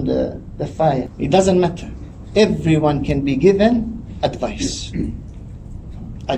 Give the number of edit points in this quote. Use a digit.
1